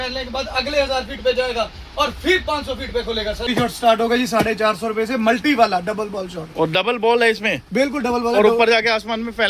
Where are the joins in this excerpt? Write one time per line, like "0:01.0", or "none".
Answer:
0:03.4